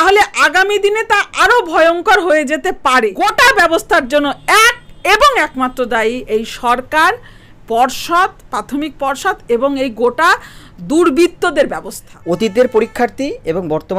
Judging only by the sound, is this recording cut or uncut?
cut